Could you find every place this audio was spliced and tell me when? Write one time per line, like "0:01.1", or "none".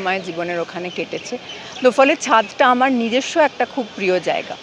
none